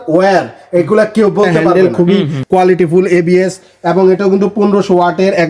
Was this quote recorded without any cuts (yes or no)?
no